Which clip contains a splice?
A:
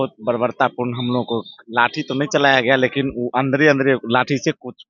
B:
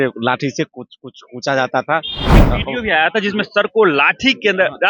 B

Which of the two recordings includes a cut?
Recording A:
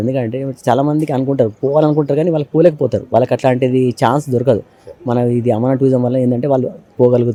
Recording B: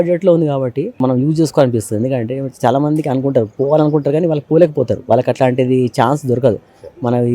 B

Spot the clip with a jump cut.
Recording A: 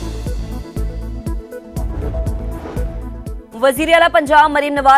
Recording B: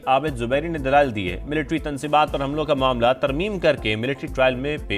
A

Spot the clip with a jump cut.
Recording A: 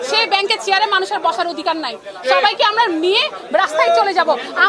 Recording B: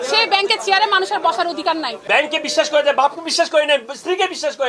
B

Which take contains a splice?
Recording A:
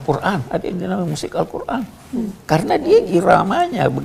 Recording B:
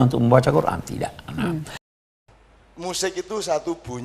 B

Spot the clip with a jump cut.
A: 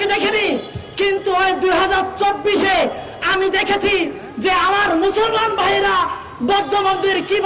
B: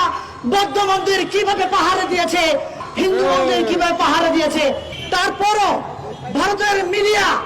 B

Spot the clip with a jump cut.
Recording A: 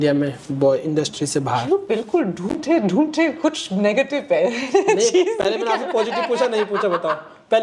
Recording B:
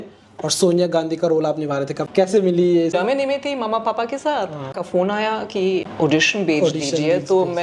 B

